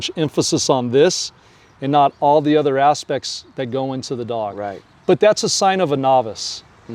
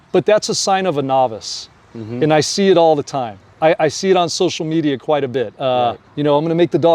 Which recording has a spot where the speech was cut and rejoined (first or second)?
second